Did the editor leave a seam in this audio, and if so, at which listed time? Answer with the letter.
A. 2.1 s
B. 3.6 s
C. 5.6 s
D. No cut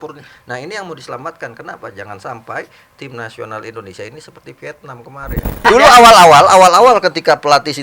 C